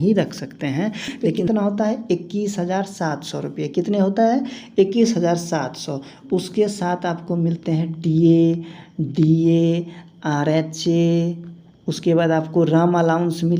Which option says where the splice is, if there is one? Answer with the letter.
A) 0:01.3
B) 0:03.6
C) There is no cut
A